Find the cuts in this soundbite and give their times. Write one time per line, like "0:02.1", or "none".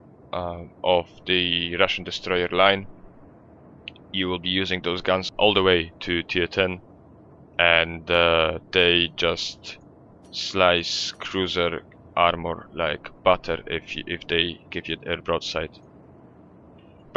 0:15.2